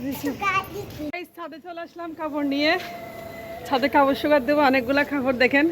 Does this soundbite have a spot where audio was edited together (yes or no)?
yes